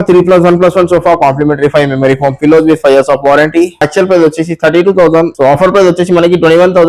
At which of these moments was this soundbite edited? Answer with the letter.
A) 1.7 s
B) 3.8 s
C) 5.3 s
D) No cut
B